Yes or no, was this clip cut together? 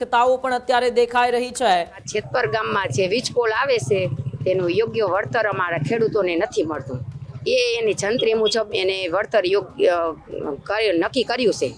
yes